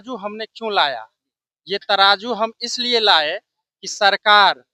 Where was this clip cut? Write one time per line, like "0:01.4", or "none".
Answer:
none